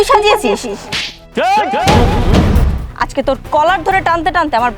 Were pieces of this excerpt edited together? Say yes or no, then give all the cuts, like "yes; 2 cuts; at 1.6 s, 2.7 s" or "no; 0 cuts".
yes; 1 cut; at 2.8 s